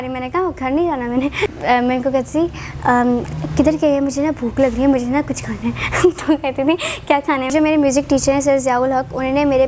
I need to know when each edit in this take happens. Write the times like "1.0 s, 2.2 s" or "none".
1.5 s, 7.5 s